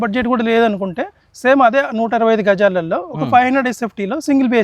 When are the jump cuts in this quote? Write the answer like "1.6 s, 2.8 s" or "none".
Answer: none